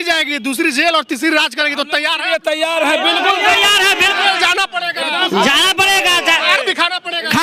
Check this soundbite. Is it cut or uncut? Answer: uncut